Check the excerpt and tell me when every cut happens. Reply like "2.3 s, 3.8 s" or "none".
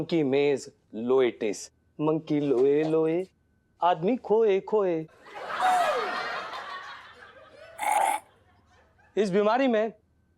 none